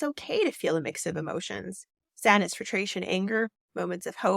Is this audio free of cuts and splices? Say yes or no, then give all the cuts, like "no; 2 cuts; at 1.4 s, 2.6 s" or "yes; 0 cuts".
yes; 0 cuts